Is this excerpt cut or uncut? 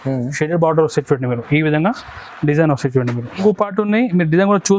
cut